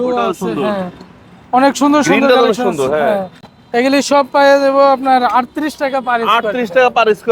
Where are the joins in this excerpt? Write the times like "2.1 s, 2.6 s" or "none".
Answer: none